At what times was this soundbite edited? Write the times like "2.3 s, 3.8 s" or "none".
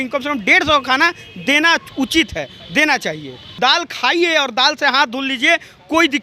3.4 s